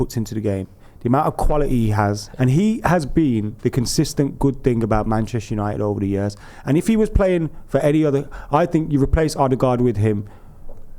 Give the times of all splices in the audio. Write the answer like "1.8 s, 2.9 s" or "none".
2.3 s